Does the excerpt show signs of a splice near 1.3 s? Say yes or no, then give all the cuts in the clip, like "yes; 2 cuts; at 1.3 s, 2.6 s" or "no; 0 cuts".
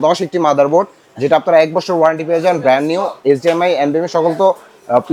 no; 0 cuts